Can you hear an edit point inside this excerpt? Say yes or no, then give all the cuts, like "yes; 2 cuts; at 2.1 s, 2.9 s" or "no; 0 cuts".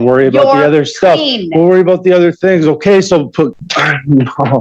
yes; 1 cut; at 3.5 s